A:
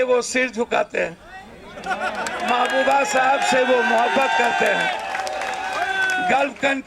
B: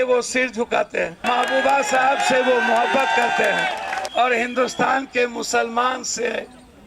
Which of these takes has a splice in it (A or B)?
B